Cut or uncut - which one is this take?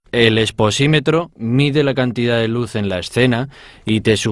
uncut